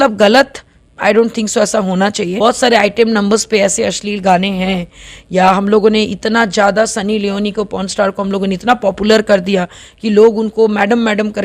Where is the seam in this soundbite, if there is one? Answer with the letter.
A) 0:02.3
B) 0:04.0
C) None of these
A